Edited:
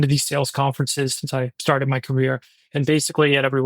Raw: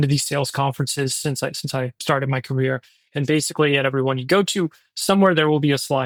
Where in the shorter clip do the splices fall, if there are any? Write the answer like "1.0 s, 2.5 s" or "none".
1.2 s